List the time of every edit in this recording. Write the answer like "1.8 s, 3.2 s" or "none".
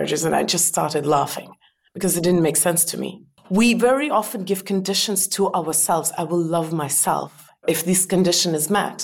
3.3 s, 7.6 s